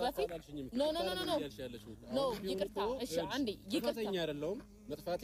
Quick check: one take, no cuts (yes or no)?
yes